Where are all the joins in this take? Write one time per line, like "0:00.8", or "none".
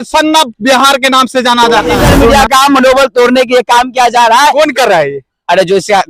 0:01.9